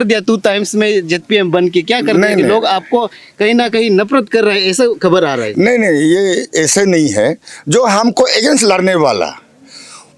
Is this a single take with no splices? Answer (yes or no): yes